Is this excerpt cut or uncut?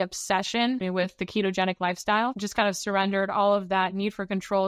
cut